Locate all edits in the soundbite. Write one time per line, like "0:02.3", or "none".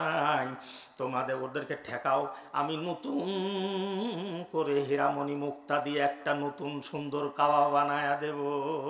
none